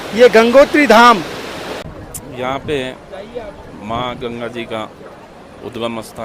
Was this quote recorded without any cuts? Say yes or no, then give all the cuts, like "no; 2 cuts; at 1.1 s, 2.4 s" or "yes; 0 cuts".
no; 1 cut; at 1.9 s